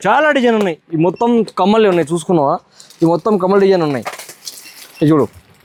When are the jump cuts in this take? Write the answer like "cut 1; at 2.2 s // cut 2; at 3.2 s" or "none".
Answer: none